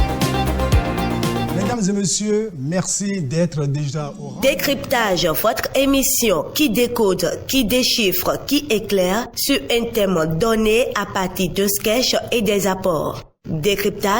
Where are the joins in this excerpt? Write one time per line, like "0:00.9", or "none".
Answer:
0:01.1